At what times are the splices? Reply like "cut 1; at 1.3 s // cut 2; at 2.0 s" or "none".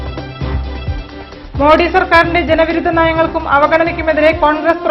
cut 1; at 1.0 s